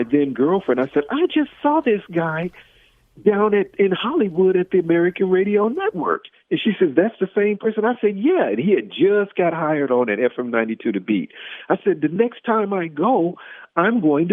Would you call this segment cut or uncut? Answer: uncut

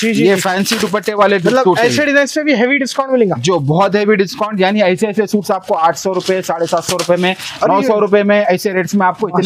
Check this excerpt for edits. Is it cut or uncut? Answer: uncut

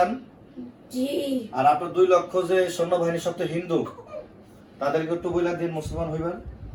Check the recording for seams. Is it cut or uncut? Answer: uncut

